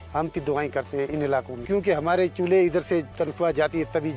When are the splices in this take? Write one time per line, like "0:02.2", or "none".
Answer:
0:01.6
0:03.1

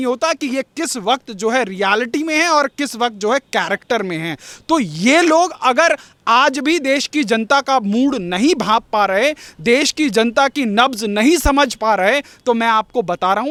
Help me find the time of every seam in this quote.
none

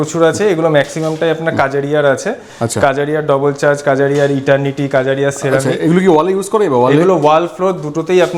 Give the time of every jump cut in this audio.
none

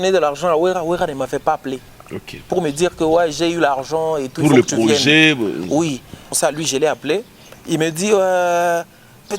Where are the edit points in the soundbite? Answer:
0:06.4

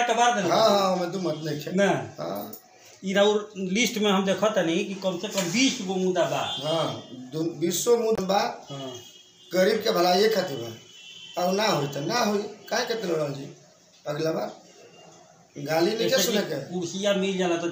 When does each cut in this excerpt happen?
0:08.2

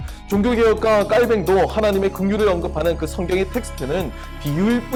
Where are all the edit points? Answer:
none

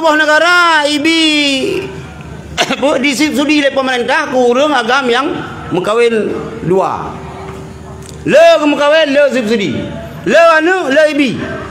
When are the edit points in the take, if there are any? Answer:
none

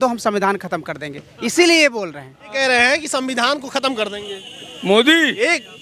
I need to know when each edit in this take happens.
0:02.5

